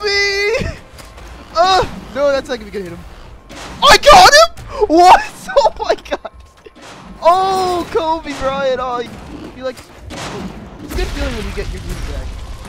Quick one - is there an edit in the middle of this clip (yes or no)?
yes